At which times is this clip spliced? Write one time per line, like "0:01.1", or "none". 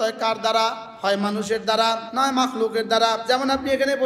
0:00.9
0:02.1
0:03.2